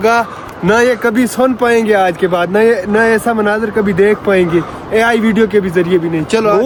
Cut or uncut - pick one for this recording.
uncut